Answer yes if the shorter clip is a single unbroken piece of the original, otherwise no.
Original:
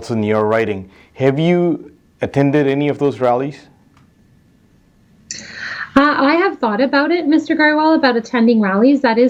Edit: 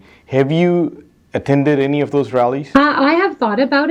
no